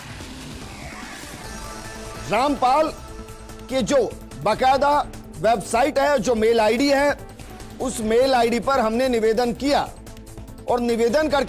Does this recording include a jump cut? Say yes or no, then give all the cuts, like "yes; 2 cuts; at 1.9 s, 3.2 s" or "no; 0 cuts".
no; 0 cuts